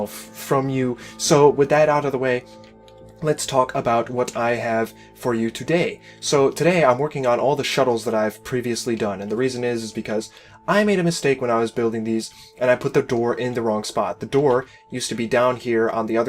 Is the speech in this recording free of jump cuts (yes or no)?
no